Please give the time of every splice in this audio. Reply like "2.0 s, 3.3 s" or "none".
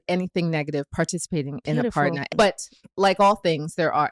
2.3 s